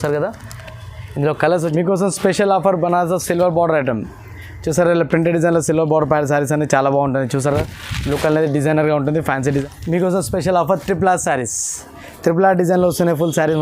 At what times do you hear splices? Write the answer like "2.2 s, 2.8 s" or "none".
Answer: 1.6 s, 9.6 s